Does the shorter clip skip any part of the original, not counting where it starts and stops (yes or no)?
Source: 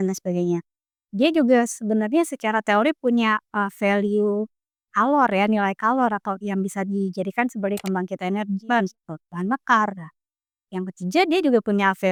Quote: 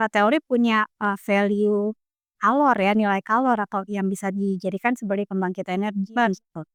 no